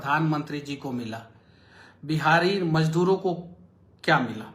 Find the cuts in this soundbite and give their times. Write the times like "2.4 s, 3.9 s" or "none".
none